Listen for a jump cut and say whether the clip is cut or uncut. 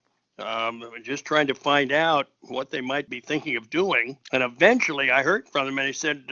cut